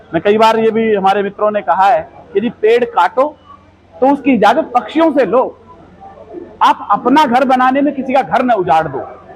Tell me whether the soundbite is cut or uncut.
uncut